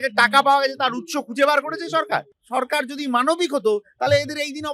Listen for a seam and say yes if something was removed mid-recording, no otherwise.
yes